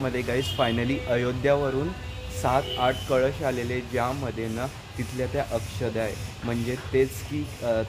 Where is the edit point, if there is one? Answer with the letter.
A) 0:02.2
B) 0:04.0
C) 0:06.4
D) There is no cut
D